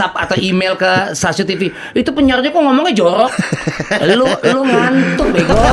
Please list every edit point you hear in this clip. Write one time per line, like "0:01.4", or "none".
none